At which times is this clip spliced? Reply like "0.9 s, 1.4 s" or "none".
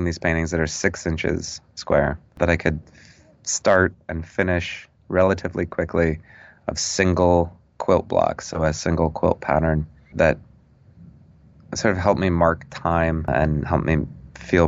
none